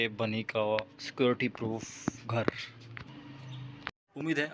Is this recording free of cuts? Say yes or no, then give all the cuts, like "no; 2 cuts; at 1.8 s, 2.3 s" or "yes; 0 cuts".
yes; 0 cuts